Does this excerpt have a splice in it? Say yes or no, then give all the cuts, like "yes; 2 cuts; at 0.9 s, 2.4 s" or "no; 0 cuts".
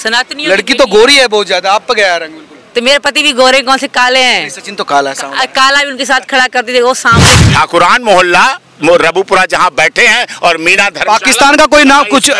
yes; 1 cut; at 7.3 s